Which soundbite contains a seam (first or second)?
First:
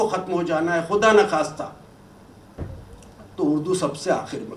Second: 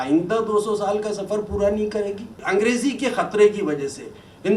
second